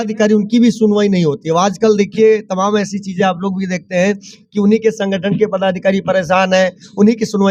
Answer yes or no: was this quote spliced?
no